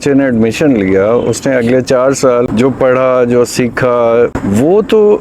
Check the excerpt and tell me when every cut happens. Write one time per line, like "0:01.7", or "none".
0:02.5
0:04.4